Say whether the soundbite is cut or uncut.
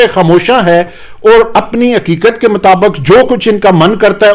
uncut